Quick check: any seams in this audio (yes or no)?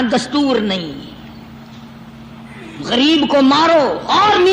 no